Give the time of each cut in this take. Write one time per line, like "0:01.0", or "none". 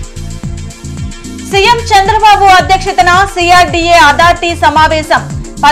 0:01.2

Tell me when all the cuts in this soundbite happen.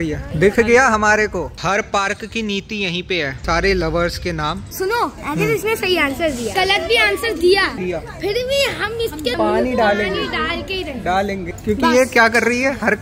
0:01.5
0:04.8
0:06.5
0:07.7
0:11.5

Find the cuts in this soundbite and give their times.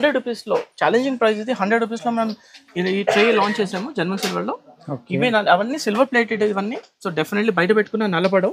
none

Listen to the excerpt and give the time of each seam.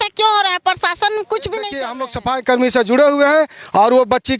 0:02.0

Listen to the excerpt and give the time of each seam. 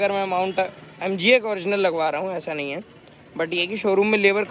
none

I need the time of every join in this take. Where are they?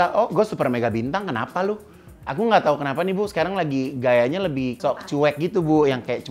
0:02.1
0:04.8

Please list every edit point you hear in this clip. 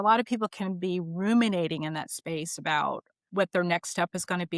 0:03.1

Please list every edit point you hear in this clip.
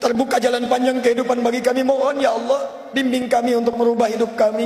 none

